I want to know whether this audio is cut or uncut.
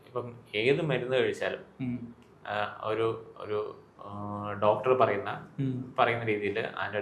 uncut